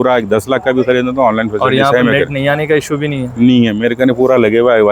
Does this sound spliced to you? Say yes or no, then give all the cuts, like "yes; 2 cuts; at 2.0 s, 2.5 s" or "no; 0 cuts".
no; 0 cuts